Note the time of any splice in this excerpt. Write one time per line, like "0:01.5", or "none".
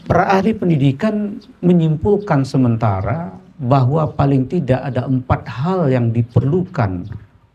none